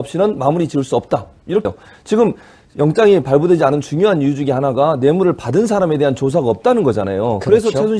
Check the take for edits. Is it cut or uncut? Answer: uncut